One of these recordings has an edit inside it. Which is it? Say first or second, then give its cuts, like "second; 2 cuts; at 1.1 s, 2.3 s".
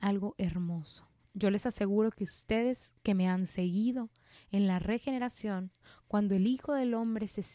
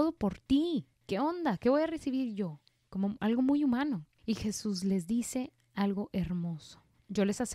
second; 2 cuts; at 1.0 s, 4.1 s